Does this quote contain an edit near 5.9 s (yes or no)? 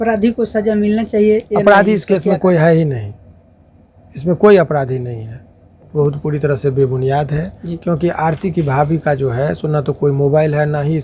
yes